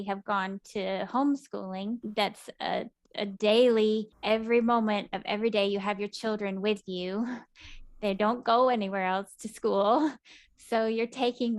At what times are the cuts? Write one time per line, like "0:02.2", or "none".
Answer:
0:02.1
0:04.1